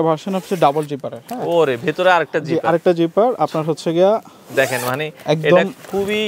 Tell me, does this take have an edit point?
no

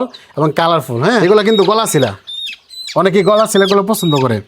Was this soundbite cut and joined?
yes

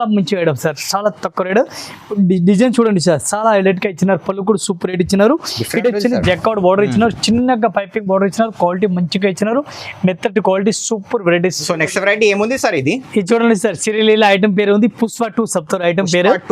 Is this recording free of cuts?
no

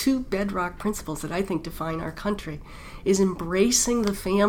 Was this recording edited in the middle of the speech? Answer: no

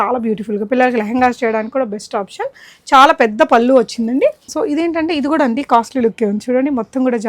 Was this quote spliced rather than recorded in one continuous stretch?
yes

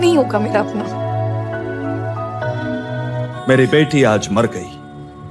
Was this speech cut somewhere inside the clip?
yes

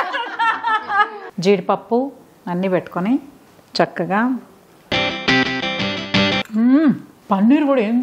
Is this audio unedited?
no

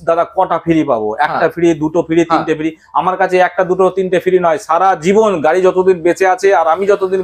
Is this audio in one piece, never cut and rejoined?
yes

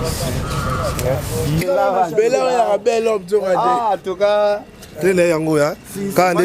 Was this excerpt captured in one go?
no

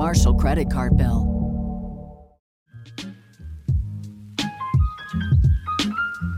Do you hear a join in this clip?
yes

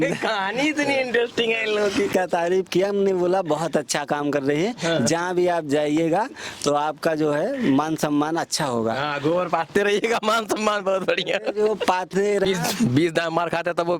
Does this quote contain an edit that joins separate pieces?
yes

